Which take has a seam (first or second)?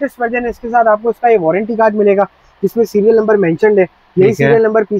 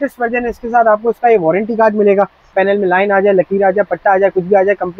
second